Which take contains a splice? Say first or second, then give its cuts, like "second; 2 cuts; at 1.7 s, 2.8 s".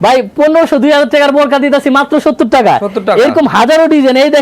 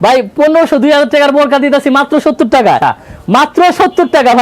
second; 1 cut; at 2.8 s